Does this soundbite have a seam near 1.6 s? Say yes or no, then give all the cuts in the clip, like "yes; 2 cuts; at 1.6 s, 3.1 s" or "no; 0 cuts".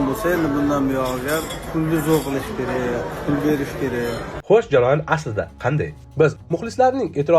yes; 3 cuts; at 1.6 s, 4.4 s, 6.4 s